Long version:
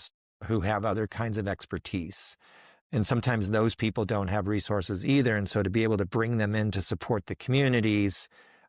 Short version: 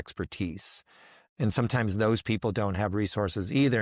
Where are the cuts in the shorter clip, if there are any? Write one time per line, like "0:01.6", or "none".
none